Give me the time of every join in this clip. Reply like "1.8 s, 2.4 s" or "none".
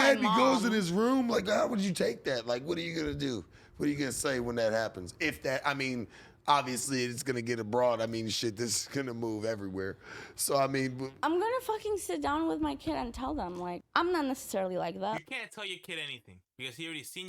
13.8 s